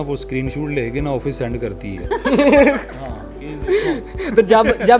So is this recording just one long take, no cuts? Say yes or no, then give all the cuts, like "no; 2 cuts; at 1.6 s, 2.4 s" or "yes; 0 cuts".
yes; 0 cuts